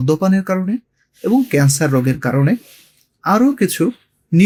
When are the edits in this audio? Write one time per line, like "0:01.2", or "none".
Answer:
none